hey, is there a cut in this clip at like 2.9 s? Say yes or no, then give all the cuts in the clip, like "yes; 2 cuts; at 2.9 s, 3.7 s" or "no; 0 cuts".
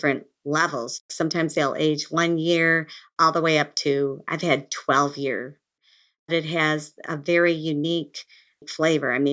no; 2 cuts; at 1.0 s, 5.7 s